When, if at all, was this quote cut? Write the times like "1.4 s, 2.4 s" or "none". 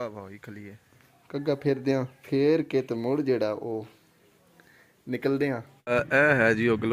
1.1 s, 2.2 s, 5.7 s